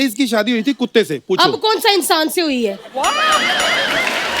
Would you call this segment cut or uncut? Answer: uncut